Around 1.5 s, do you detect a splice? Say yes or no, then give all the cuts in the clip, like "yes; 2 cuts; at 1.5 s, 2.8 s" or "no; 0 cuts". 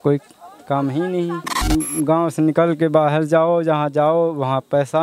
yes; 1 cut; at 1.5 s